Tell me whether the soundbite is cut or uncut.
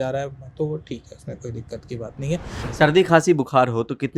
cut